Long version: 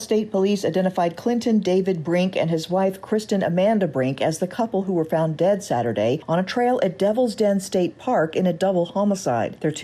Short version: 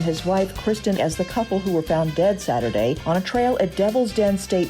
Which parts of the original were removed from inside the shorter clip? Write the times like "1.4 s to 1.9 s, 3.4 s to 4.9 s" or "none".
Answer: 3.4 s to 4.2 s